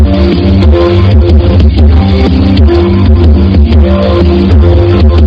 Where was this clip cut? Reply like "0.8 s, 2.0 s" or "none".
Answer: none